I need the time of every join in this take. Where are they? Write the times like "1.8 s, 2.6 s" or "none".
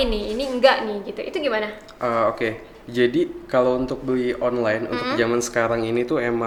none